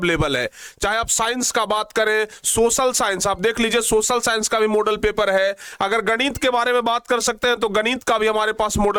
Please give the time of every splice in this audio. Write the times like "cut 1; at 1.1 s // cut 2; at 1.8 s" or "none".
none